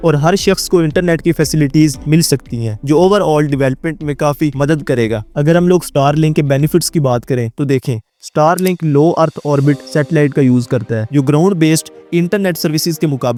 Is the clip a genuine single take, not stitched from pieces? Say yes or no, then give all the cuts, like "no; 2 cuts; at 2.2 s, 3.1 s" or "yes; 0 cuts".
yes; 0 cuts